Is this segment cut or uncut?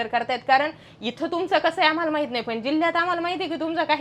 uncut